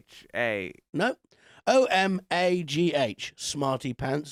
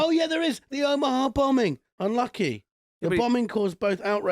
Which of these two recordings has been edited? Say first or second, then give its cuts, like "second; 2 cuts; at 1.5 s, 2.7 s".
second; 1 cut; at 1.9 s